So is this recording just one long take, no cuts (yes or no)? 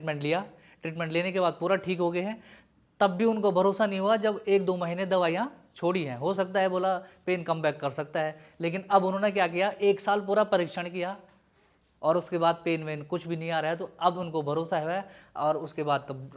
yes